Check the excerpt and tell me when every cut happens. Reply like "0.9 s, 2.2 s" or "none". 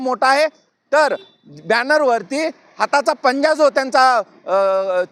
none